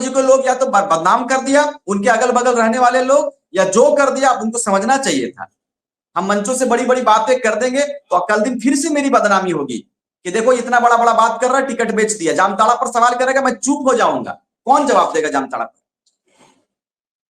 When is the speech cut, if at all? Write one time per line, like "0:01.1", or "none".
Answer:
none